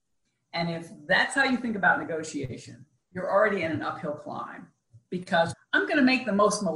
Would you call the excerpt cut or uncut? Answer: cut